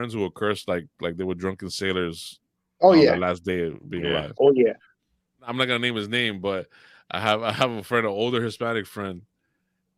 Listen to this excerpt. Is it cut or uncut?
cut